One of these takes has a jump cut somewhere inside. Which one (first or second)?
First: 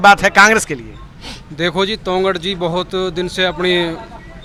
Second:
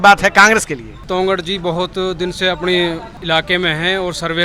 second